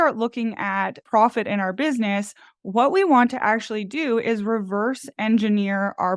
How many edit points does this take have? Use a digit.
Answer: 1